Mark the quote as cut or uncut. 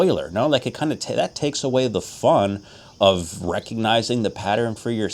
uncut